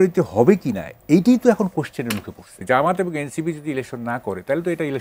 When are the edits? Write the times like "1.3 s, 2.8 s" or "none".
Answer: 2.6 s